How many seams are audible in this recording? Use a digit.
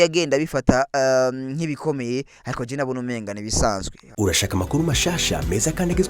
1